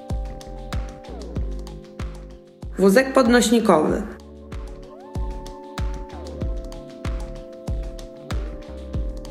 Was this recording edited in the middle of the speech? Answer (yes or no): yes